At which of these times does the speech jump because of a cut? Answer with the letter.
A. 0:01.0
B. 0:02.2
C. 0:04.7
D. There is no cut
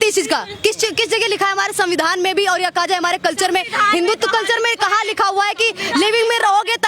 D